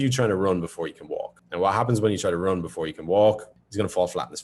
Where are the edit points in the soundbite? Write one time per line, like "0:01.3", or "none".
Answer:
0:03.5